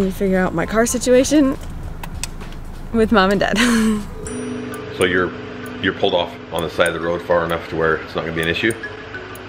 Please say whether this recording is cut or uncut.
uncut